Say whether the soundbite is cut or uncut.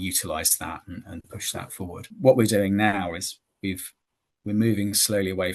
cut